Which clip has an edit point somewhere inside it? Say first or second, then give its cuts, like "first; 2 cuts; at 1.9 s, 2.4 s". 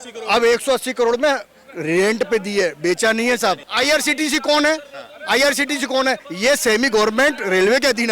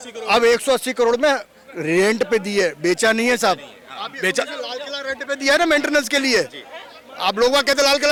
first; 1 cut; at 3.7 s